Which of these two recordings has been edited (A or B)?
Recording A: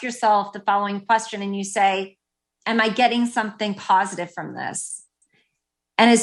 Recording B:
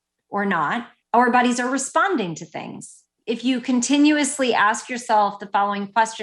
B